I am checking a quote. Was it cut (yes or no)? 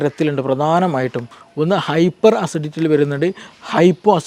no